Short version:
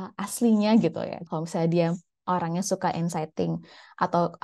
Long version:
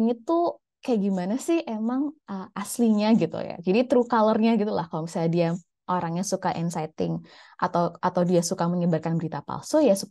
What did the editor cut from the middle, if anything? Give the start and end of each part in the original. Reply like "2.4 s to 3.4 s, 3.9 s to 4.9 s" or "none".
3.6 s to 4.8 s